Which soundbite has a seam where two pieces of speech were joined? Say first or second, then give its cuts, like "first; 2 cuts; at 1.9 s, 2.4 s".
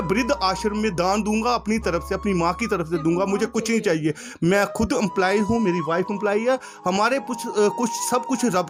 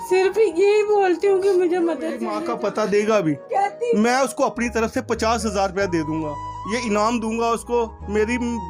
second; 1 cut; at 2.2 s